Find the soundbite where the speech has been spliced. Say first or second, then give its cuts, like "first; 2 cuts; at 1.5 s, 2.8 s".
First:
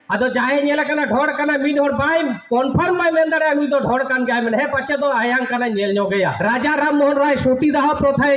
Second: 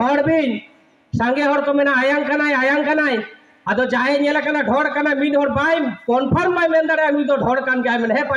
first; 1 cut; at 6.4 s